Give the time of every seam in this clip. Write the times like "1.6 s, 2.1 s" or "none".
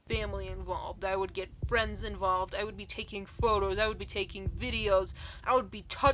none